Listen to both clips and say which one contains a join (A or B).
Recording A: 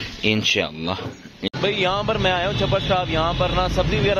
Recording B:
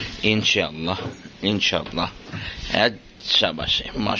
A